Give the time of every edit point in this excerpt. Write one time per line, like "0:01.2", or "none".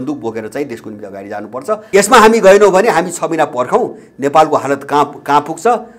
0:01.8